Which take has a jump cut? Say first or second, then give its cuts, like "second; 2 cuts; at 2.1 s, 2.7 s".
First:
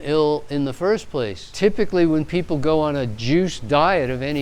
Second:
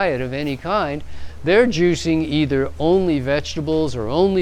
first; 1 cut; at 1.4 s